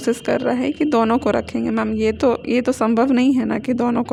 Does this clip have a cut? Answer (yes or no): no